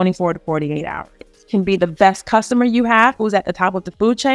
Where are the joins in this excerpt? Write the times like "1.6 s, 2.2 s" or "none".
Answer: 1.2 s, 3.2 s